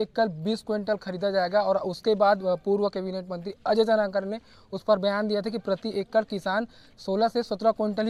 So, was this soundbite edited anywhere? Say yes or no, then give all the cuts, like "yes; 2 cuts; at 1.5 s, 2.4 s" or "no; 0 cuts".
no; 0 cuts